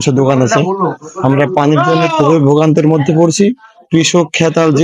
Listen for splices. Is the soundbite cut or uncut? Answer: uncut